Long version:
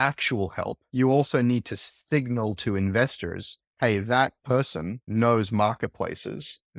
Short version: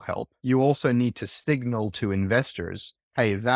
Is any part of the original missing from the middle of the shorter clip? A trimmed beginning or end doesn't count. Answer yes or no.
yes